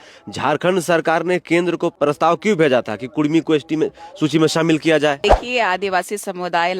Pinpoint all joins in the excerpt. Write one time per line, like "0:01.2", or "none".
0:01.9
0:05.2